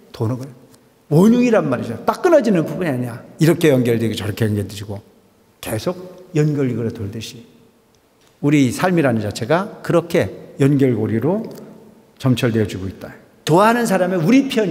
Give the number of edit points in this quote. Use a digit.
1